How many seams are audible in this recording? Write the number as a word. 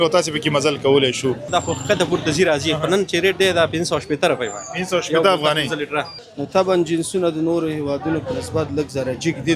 two